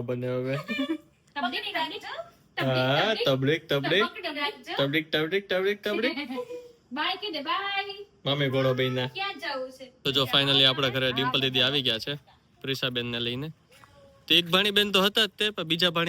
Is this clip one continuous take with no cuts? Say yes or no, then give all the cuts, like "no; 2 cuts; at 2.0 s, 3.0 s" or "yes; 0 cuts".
no; 1 cut; at 9.9 s